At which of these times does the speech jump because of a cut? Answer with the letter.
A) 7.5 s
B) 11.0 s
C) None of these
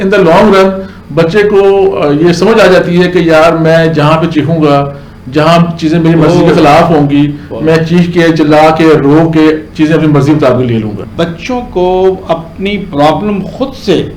B